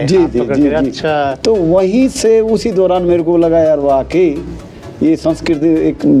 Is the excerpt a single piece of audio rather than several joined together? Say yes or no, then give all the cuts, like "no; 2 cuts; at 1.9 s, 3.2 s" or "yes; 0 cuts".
yes; 0 cuts